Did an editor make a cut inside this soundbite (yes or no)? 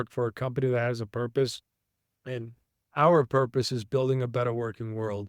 no